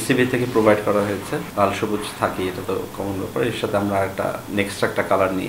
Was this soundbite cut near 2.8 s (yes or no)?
no